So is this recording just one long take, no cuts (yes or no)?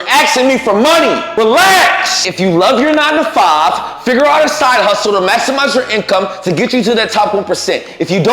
no